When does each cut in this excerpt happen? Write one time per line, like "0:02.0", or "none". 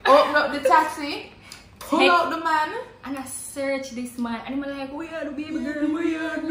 none